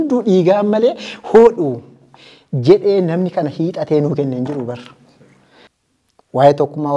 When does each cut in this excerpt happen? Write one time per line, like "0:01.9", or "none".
0:05.7